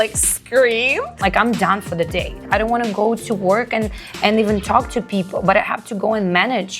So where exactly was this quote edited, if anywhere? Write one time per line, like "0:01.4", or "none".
0:01.1
0:02.4